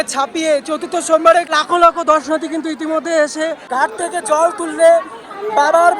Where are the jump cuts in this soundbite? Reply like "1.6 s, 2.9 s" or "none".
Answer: 1.5 s, 3.6 s